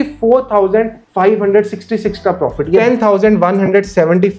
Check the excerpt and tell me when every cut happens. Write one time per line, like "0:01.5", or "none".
0:02.8